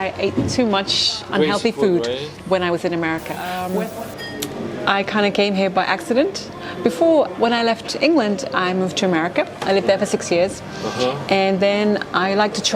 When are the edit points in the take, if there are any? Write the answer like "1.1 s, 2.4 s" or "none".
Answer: 3.7 s